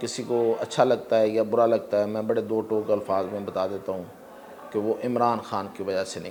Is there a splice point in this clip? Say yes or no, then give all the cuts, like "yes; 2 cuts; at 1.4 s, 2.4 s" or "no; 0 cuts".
no; 0 cuts